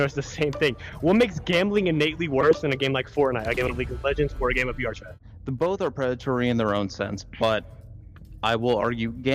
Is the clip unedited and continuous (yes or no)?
no